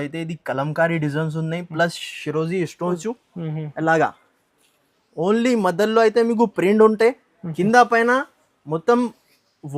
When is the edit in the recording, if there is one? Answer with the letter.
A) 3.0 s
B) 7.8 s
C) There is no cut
A